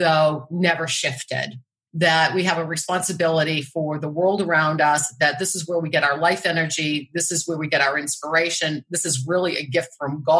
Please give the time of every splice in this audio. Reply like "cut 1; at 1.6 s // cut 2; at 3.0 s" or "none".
cut 1; at 1.8 s